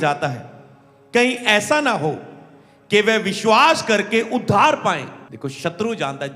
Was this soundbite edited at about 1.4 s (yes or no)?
no